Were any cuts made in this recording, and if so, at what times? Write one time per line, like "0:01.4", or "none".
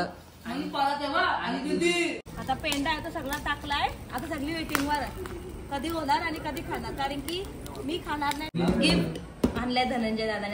0:02.3
0:08.7